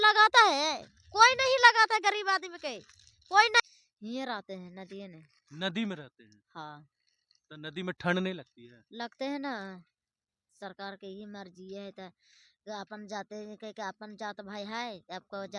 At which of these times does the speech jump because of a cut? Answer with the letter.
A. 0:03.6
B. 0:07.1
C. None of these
A